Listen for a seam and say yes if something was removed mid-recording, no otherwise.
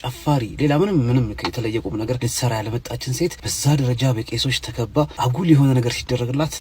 yes